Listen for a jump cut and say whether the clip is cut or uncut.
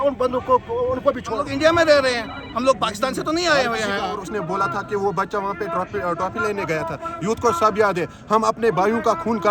cut